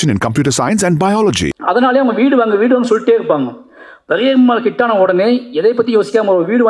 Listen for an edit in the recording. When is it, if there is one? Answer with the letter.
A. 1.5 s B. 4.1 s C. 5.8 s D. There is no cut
A